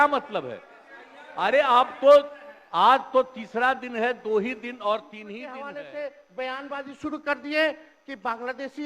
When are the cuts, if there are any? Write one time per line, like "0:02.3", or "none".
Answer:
0:05.7

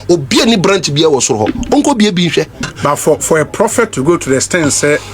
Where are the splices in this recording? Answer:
0:02.7

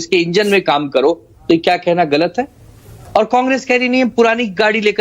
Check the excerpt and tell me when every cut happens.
0:01.4

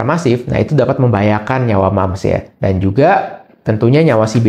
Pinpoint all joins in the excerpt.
none

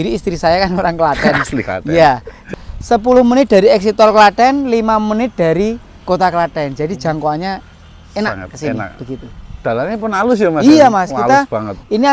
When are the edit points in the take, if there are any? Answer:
0:02.4

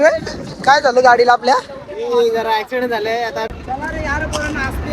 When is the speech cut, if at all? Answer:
0:03.5

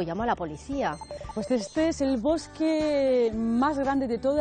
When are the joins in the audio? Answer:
0:01.2

